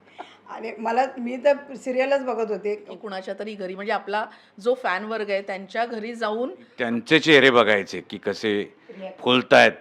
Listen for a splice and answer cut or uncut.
cut